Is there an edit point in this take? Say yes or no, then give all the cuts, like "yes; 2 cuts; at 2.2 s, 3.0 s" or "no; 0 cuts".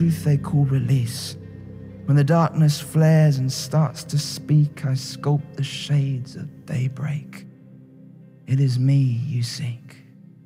no; 0 cuts